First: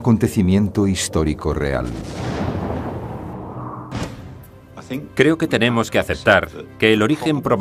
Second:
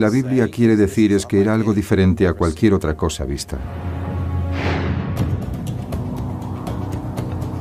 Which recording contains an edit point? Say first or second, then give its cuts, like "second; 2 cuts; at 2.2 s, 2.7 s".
second; 1 cut; at 4.1 s